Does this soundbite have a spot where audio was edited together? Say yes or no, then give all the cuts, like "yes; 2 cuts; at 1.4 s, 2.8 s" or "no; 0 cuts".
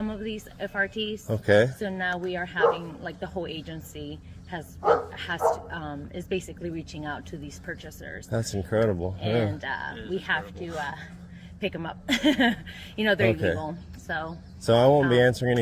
yes; 1 cut; at 1.2 s